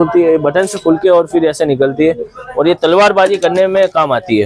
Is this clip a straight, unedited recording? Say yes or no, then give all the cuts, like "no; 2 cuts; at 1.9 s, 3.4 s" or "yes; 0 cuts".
yes; 0 cuts